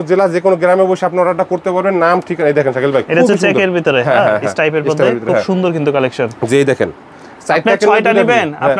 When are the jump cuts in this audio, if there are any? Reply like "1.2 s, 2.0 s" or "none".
none